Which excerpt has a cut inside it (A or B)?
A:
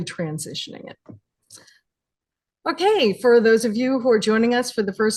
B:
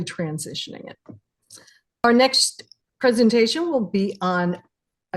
B